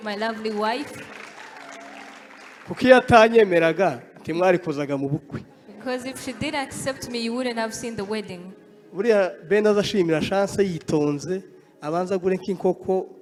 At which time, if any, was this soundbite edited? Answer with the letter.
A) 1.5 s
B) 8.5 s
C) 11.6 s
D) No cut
D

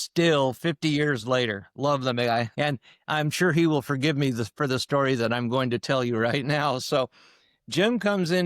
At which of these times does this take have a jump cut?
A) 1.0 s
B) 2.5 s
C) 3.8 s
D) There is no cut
B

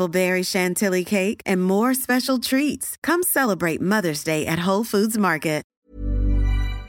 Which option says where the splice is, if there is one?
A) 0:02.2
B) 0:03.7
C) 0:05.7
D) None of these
C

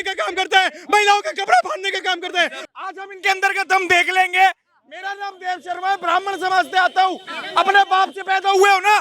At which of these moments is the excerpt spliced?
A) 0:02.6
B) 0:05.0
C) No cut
A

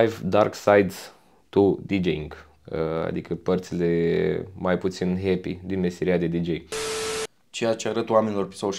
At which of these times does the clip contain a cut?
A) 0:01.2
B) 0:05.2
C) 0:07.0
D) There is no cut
C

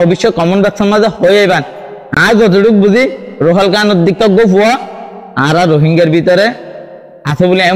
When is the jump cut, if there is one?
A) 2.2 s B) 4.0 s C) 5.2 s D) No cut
D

